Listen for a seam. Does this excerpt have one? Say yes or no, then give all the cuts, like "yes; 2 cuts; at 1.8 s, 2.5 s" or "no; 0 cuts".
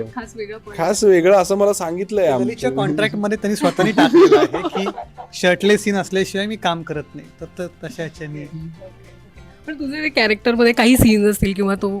no; 0 cuts